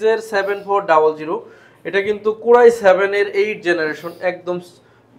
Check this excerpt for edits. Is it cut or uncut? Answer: uncut